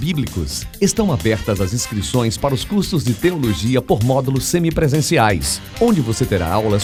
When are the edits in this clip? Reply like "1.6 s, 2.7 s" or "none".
none

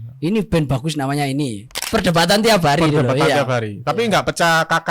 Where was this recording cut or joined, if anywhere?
1.8 s

